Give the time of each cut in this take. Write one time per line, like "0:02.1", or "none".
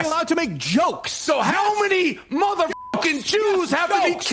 none